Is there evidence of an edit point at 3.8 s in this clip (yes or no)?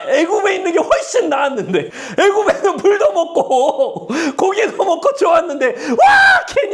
no